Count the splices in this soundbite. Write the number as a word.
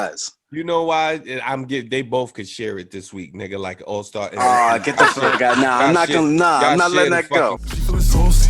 one